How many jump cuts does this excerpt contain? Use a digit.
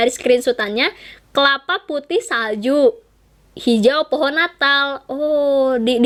0